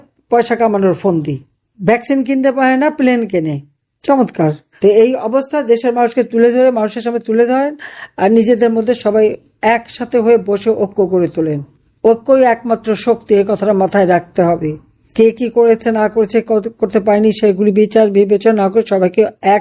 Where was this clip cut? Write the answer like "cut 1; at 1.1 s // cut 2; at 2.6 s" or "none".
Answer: none